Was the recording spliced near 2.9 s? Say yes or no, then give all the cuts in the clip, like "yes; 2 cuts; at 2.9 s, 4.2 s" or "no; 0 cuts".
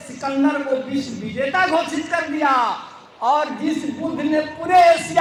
no; 0 cuts